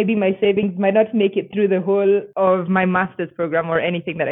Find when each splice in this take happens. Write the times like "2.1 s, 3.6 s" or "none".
none